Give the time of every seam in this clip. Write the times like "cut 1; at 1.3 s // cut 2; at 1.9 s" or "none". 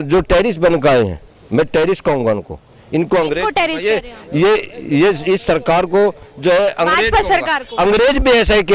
none